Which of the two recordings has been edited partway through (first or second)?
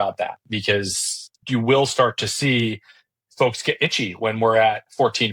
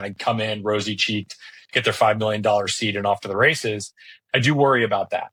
first